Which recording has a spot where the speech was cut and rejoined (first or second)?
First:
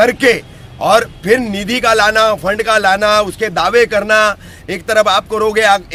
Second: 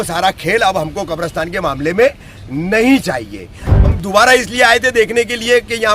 second